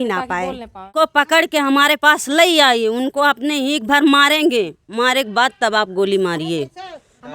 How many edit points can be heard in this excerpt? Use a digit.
1